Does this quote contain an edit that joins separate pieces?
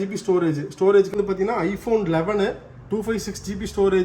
yes; 1 cut; at 1.1 s

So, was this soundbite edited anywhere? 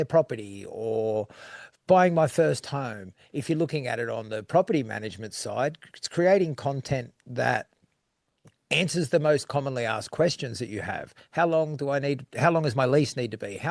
no; 0 cuts

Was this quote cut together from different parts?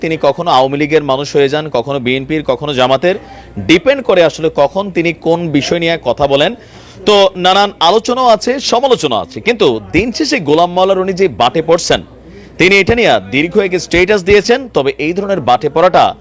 no; 0 cuts

